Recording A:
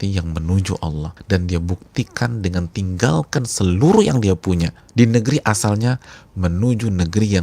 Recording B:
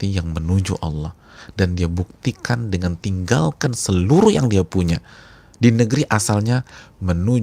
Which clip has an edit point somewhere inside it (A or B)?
A